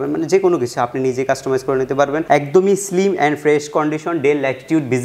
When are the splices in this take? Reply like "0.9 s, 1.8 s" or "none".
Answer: 2.2 s